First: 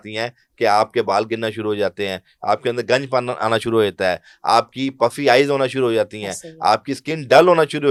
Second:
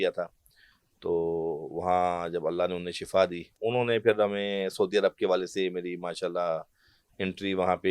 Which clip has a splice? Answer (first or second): second